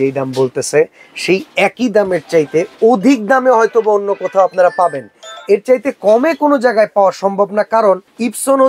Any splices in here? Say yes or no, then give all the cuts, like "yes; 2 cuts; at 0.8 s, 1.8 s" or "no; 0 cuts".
no; 0 cuts